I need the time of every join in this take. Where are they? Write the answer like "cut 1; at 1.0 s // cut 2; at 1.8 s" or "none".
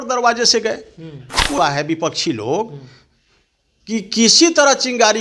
cut 1; at 1.6 s